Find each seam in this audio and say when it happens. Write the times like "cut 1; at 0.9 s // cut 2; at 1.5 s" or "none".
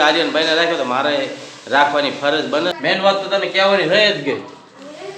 cut 1; at 2.8 s